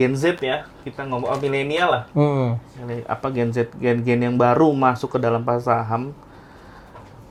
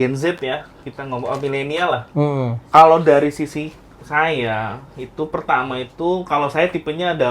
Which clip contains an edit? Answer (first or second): second